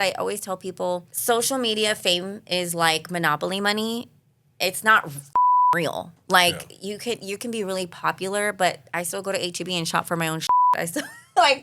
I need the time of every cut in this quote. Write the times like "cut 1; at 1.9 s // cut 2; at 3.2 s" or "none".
cut 1; at 1.1 s